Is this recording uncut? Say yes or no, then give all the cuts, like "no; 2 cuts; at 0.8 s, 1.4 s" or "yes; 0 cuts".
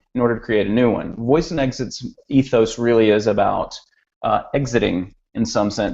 no; 1 cut; at 3.2 s